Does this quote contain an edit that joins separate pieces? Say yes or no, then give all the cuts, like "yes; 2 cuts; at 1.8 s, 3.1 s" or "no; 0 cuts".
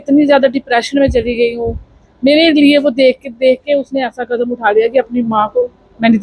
no; 0 cuts